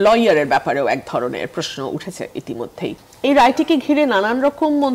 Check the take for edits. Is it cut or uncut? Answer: cut